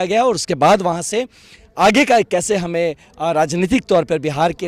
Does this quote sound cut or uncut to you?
uncut